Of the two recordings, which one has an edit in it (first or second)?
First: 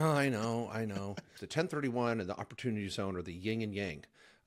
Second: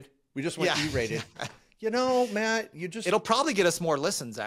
first